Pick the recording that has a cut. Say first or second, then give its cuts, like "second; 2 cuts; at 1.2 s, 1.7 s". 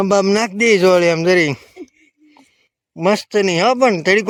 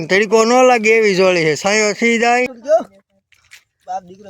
second; 1 cut; at 2.6 s